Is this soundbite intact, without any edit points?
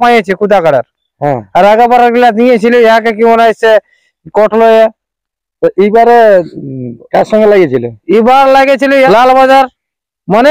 yes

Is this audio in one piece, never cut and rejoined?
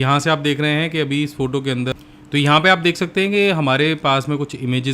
no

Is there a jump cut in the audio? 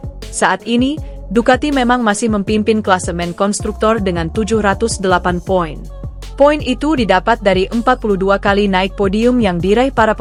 no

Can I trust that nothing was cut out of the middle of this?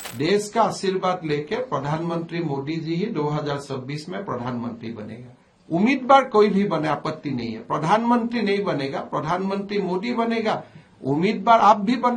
yes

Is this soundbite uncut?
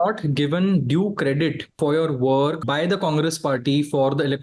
no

